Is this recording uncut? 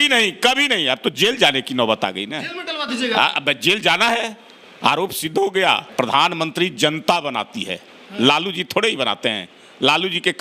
no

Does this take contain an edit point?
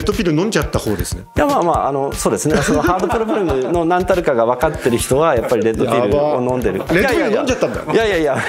no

